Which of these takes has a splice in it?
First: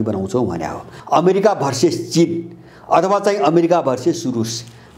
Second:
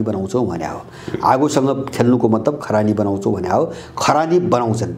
first; 1 cut; at 0.9 s

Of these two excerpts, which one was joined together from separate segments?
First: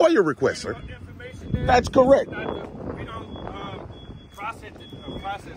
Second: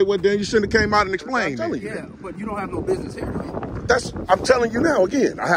second; 1 cut; at 1.7 s

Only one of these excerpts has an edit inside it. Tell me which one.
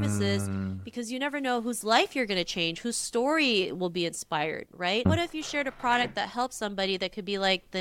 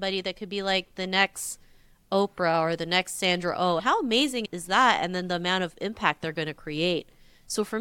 first; 1 cut; at 5.1 s

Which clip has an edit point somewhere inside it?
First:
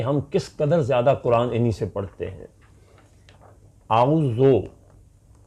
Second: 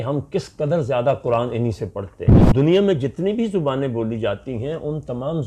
second; 1 cut; at 2.5 s

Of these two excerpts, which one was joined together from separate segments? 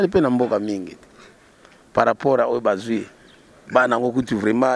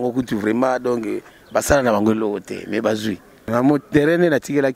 second; 1 cut; at 3.5 s

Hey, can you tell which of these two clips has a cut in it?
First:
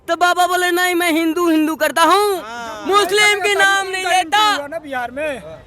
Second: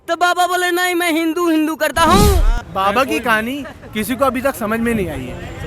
second; 1 cut; at 2.6 s

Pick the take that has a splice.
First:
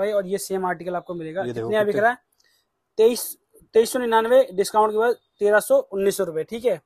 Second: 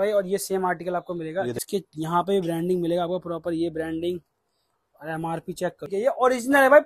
second; 2 cuts; at 1.6 s, 5.9 s

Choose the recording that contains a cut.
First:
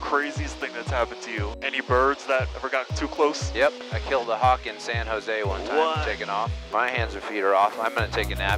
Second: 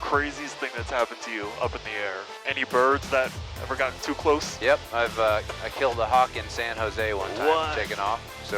first; 4 cuts; at 1.5 s, 2.6 s, 3.8 s, 6.6 s

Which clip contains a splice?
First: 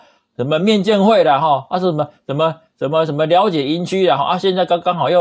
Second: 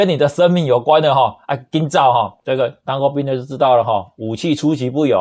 second; 1 cut; at 2.4 s

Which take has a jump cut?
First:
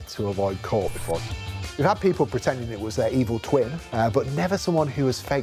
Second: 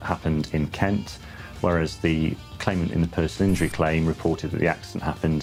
first; 1 cut; at 3.8 s

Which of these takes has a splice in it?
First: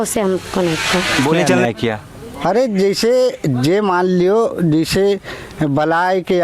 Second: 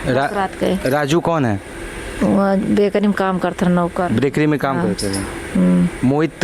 first; 1 cut; at 1.5 s

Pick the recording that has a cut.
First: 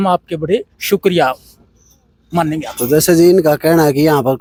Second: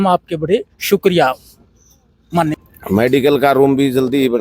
second; 1 cut; at 2.6 s

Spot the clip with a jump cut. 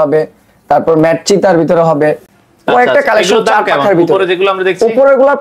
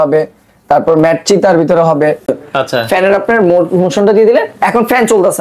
second; 1 cut; at 2.4 s

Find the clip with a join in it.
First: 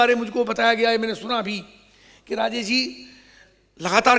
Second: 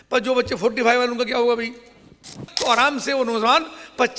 second; 1 cut; at 2.5 s

